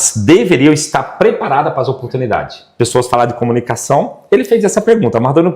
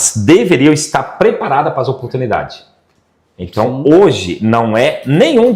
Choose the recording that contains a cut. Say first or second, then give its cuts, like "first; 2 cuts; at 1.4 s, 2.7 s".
first; 1 cut; at 2.6 s